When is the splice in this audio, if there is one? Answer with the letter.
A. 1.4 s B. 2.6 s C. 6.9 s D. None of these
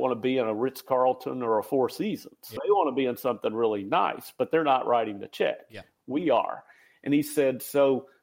B